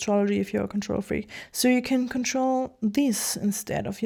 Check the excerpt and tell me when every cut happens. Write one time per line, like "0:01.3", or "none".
none